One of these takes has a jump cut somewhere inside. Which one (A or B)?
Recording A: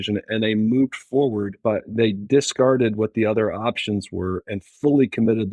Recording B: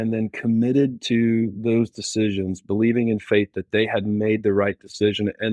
A